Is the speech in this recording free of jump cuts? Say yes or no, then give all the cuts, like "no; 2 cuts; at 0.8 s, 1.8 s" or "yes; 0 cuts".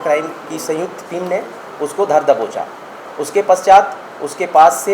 yes; 0 cuts